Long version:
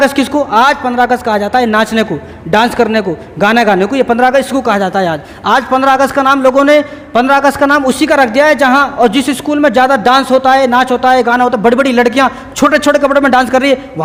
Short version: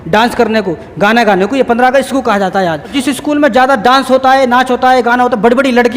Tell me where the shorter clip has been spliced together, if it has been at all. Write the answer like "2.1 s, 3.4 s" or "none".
3.0 s